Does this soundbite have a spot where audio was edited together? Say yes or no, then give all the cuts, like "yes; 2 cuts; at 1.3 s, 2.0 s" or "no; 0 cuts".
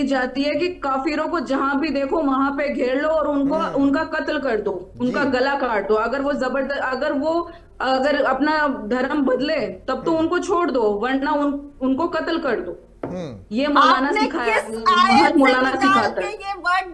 no; 0 cuts